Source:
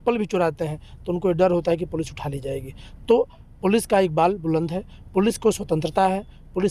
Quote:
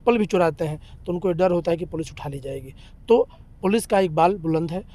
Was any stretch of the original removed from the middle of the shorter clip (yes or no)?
no